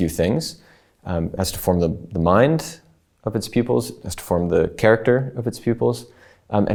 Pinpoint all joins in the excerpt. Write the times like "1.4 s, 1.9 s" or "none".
none